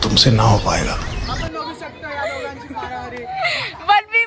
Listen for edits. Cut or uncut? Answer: cut